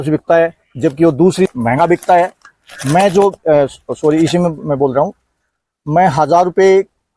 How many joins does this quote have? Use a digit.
1